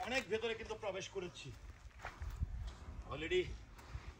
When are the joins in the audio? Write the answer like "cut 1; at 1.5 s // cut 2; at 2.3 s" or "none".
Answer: none